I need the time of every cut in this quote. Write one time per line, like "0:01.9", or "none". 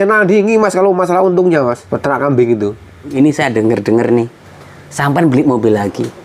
0:01.8
0:03.1